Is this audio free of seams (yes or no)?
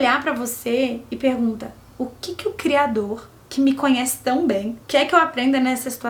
yes